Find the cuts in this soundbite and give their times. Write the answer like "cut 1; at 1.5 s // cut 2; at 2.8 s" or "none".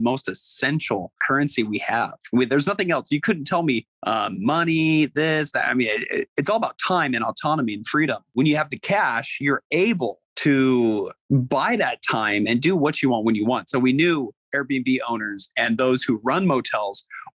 cut 1; at 1.2 s // cut 2; at 3.9 s // cut 3; at 8.3 s // cut 4; at 10.3 s // cut 5; at 11.2 s